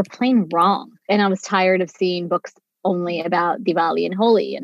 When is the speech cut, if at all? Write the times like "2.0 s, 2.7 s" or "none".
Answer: 0.9 s